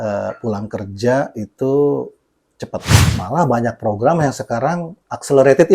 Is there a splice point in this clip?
yes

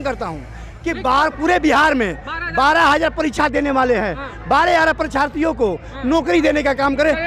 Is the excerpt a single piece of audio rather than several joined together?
yes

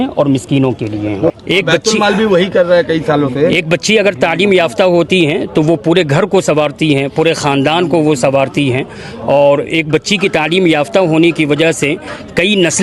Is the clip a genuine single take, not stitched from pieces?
yes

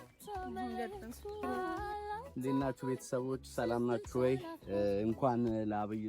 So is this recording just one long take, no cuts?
no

